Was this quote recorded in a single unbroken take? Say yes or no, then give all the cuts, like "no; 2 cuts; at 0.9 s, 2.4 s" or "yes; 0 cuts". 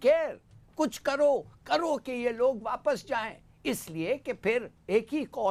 yes; 0 cuts